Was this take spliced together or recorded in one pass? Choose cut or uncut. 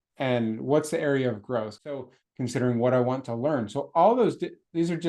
cut